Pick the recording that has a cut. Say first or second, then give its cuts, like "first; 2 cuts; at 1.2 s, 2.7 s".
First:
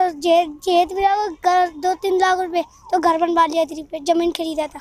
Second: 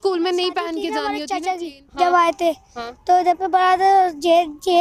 second; 1 cut; at 1.0 s